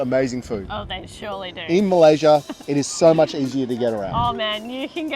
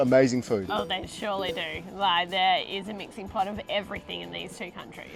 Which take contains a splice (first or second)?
first